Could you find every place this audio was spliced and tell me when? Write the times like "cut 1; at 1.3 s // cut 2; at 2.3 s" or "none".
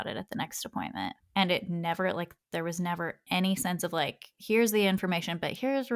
none